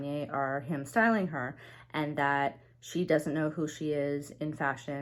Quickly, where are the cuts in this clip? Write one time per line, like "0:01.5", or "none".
none